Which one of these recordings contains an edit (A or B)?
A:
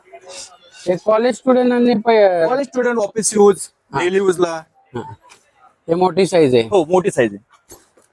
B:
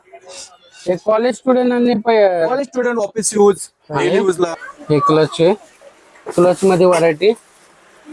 B